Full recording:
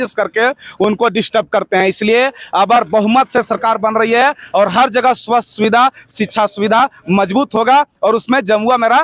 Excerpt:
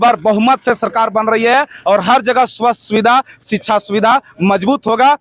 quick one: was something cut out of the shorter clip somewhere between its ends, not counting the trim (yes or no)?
no